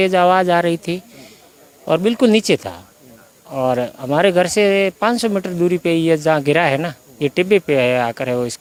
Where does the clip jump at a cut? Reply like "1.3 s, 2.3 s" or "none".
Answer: none